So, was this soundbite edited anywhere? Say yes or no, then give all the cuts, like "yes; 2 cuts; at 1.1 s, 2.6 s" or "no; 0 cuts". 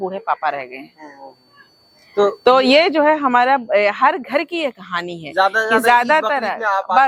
no; 0 cuts